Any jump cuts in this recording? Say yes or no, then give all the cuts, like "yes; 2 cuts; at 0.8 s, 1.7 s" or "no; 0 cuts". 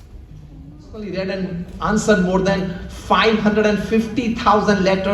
yes; 1 cut; at 1.1 s